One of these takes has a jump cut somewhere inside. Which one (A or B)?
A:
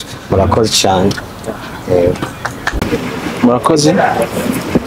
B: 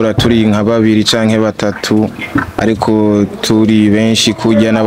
A